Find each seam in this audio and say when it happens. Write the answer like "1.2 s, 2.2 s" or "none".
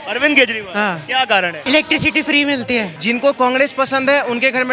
1.6 s, 2.9 s